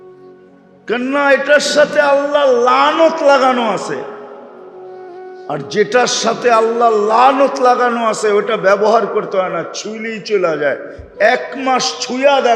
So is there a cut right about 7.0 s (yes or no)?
no